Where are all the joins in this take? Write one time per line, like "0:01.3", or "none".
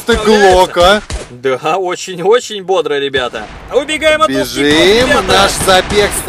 0:03.6